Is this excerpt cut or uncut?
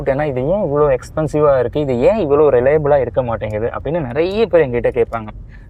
uncut